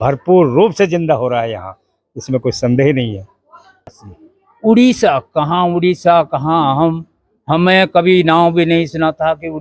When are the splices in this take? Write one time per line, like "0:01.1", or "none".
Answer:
0:03.8